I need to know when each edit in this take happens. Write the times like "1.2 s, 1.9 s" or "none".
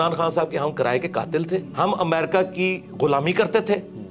1.7 s